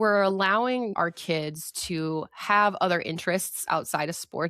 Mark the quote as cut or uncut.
cut